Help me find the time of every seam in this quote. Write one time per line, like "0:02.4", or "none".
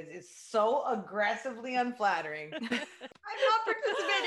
0:03.0